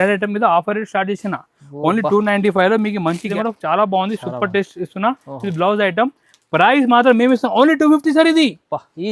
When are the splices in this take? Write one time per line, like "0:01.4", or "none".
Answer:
0:03.3

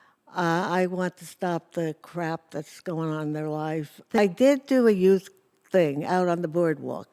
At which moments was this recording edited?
0:04.2

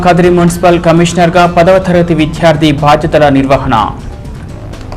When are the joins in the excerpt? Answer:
0:04.0

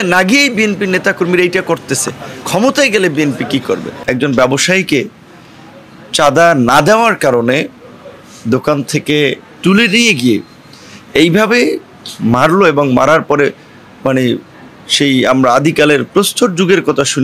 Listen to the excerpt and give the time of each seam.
0:03.9

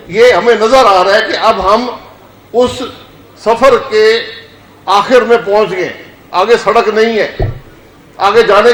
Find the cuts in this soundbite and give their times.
none

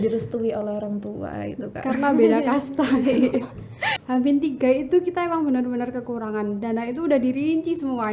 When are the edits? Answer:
0:03.9

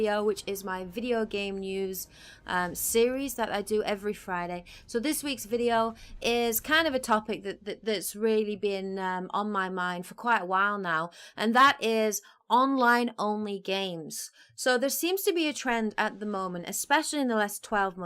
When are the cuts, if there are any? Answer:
0:03.0

